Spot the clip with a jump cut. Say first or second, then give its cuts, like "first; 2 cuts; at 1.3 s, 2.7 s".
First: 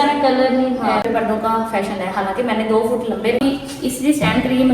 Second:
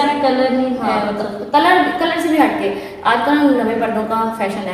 first; 2 cuts; at 1.0 s, 3.4 s